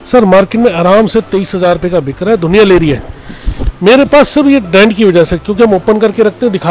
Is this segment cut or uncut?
uncut